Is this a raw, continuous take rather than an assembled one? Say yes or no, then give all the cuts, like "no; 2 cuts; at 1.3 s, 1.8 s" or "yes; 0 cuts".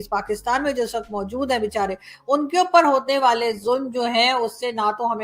yes; 0 cuts